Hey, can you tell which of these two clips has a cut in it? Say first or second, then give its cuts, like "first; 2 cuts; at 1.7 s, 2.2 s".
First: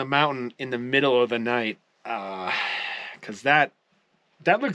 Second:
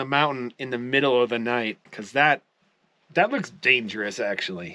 second; 1 cut; at 1.9 s